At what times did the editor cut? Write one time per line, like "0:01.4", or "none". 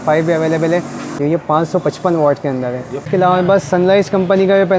0:01.2
0:03.1